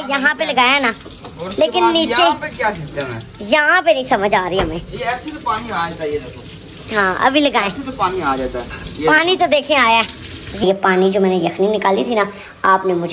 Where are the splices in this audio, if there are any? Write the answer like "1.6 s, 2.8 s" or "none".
10.6 s